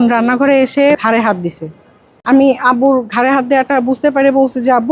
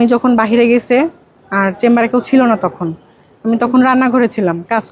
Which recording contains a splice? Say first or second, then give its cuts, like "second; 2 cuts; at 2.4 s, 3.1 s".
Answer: first; 2 cuts; at 1.0 s, 2.2 s